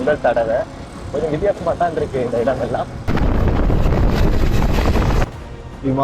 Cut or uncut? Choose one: cut